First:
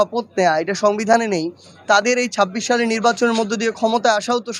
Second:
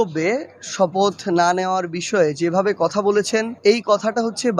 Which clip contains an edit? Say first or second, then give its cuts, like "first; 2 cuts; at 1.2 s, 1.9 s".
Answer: second; 1 cut; at 3.5 s